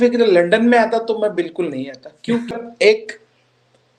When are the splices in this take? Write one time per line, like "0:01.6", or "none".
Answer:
0:02.7